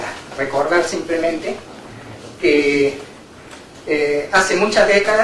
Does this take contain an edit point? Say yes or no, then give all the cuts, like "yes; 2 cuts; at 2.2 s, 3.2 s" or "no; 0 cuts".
yes; 1 cut; at 3.0 s